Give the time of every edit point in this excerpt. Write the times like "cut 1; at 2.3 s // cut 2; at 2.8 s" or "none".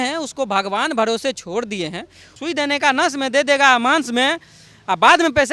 cut 1; at 2.3 s